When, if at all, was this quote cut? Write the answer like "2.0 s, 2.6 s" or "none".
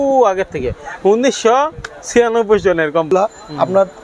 3.1 s